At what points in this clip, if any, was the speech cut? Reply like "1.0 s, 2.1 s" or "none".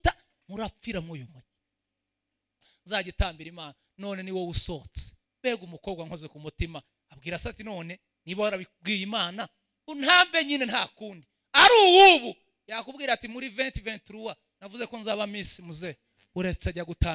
2.7 s